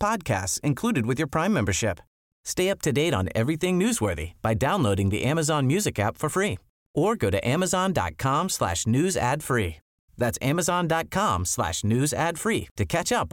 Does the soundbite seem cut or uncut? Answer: uncut